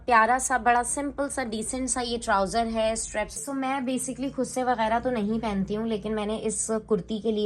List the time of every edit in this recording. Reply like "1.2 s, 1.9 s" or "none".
3.4 s